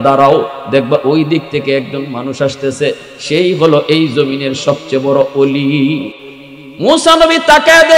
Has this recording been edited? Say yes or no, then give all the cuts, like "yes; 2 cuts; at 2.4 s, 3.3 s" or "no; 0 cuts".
yes; 1 cut; at 6.1 s